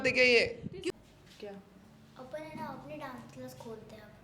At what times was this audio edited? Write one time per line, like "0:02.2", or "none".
0:00.9